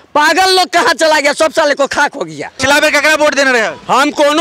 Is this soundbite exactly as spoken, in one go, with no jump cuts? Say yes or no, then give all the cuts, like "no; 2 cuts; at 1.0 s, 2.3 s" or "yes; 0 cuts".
no; 1 cut; at 2.6 s